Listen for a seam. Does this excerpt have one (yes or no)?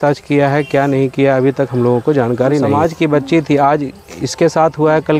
yes